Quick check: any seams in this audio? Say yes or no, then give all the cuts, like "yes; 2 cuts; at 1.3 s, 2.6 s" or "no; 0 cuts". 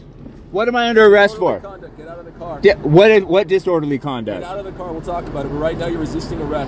no; 0 cuts